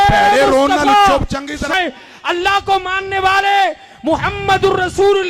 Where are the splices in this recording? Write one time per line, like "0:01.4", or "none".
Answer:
0:01.7